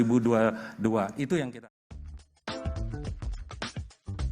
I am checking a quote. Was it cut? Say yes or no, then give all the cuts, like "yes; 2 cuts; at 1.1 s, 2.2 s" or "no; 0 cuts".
yes; 1 cut; at 1.5 s